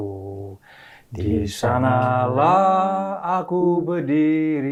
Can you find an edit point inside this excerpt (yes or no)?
no